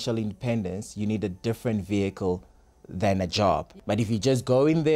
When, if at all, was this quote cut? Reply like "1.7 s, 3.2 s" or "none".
3.6 s